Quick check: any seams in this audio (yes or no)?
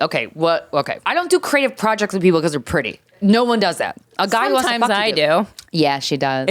yes